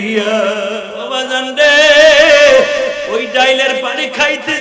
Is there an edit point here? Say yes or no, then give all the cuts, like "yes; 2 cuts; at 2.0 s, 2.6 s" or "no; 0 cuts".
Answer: yes; 1 cut; at 0.9 s